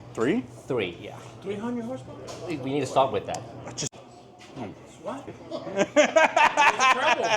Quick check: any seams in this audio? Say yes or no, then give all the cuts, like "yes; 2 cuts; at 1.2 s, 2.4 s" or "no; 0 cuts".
no; 0 cuts